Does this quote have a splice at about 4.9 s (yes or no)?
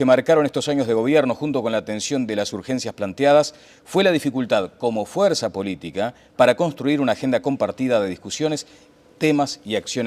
yes